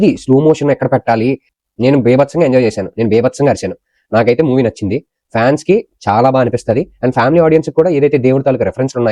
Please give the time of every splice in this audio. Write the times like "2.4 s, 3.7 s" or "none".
1.5 s